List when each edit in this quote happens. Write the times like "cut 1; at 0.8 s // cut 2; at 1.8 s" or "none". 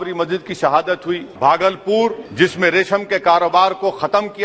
cut 1; at 1.3 s // cut 2; at 2.2 s